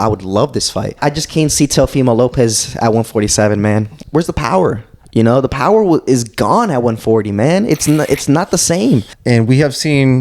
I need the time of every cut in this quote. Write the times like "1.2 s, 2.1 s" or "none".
0.9 s, 3.9 s, 9.1 s